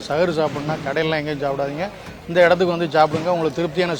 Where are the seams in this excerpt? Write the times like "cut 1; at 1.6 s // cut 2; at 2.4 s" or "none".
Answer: none